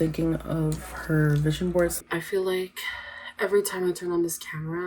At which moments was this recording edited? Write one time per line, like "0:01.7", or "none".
0:02.0